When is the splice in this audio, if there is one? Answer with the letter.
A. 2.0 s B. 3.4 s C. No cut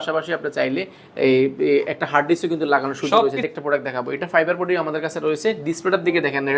B